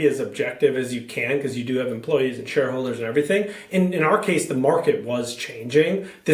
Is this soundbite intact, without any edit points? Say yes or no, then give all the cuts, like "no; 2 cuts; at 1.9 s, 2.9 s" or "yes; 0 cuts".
yes; 0 cuts